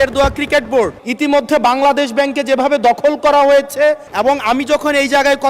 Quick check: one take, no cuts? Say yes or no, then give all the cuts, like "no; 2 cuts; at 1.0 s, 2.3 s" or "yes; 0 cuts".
no; 2 cuts; at 1.0 s, 4.1 s